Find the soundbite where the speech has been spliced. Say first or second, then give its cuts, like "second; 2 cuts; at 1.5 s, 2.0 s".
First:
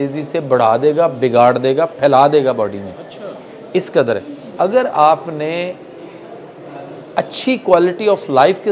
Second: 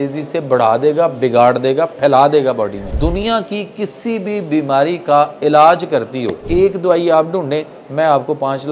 second; 2 cuts; at 2.9 s, 6.5 s